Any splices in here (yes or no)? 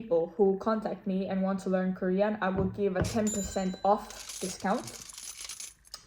no